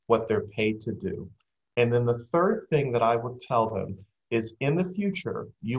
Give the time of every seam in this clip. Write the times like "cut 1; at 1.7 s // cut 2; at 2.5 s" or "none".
none

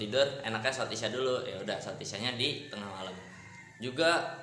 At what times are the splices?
none

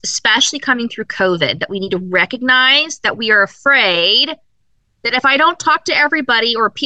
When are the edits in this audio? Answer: none

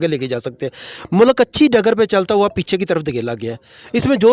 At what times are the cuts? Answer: none

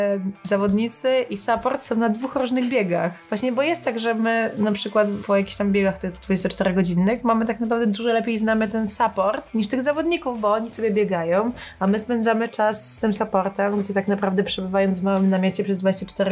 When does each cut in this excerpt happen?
cut 1; at 3.2 s // cut 2; at 5.2 s

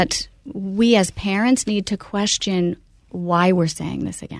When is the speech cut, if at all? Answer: none

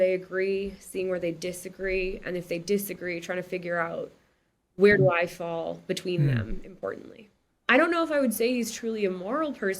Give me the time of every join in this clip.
cut 1; at 7.5 s

